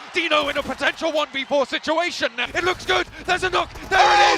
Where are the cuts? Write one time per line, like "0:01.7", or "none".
0:02.4